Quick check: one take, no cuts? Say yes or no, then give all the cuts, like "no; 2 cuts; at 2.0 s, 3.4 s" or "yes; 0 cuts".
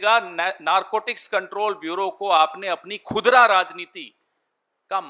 yes; 0 cuts